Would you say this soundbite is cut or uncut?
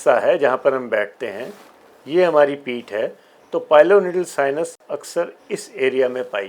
uncut